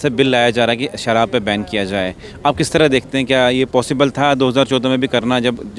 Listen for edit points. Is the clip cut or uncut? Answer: uncut